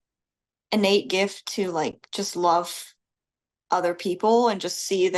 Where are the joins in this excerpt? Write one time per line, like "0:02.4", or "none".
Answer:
none